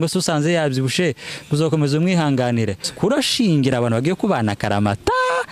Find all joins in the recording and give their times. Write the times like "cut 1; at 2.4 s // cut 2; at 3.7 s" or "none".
cut 1; at 2.9 s